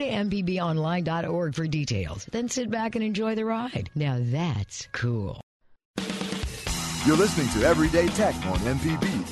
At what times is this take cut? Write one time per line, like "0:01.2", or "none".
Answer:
0:05.7